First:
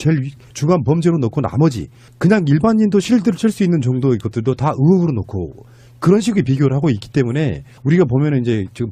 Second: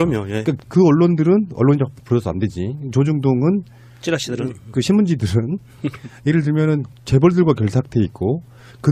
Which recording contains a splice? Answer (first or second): first